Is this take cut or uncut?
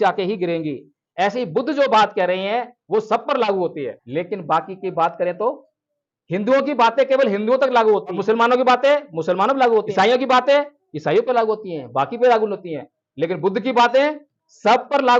cut